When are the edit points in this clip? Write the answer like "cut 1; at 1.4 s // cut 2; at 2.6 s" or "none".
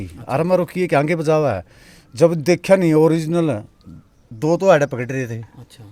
none